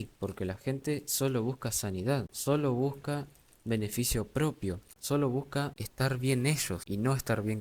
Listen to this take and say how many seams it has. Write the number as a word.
four